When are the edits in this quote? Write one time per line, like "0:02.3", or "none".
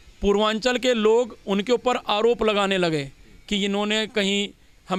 none

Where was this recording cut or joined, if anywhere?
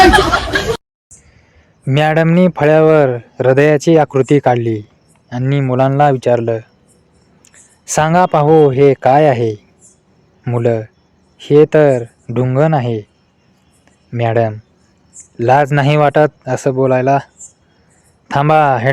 0:00.9

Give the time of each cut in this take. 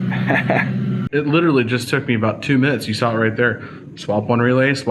0:01.1

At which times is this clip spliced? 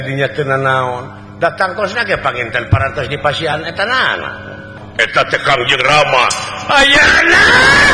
0:04.6

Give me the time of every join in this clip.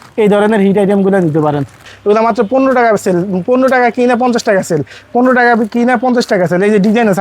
0:01.9

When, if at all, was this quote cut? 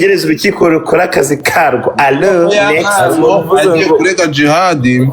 none

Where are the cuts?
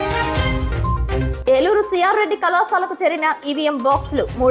0:01.3

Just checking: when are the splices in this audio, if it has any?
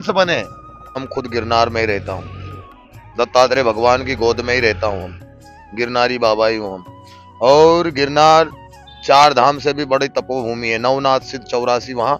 0:01.1

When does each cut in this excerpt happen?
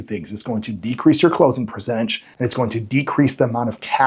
0:02.2

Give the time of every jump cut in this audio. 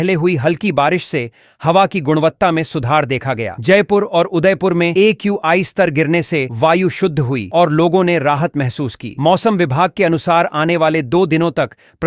none

